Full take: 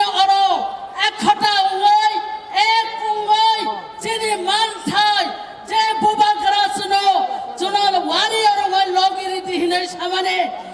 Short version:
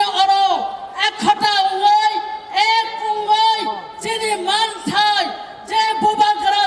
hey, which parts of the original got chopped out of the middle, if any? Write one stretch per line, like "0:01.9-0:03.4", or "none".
none